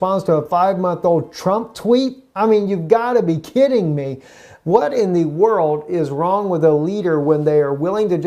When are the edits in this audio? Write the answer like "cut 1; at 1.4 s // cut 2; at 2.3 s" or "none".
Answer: cut 1; at 2.7 s